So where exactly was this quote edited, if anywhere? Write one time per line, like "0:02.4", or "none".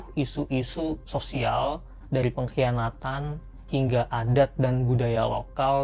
none